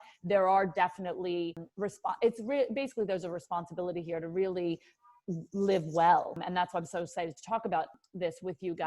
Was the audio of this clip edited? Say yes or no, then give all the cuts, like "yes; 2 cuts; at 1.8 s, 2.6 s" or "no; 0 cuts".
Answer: yes; 3 cuts; at 1.6 s, 6.4 s, 7.9 s